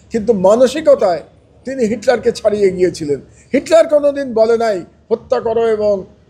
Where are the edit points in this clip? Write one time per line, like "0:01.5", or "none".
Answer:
none